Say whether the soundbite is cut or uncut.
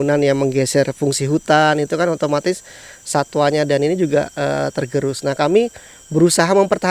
uncut